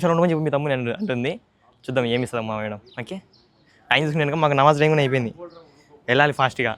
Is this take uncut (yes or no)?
yes